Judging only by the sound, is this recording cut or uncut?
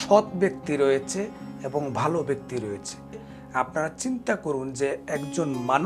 cut